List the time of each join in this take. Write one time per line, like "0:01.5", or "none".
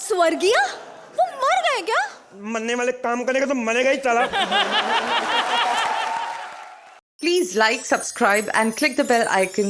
0:06.5